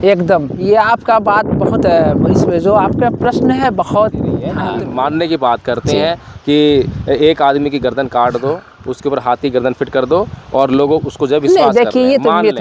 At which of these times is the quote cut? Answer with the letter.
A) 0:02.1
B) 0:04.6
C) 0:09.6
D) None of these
B